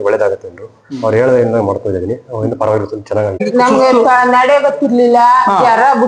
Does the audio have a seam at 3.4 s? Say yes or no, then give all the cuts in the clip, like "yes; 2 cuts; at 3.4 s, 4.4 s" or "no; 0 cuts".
yes; 1 cut; at 3.4 s